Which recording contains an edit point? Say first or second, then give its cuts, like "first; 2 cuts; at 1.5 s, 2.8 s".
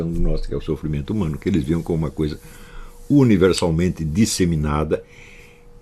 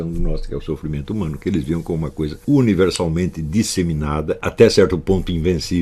second; 2 cuts; at 2.4 s, 4.5 s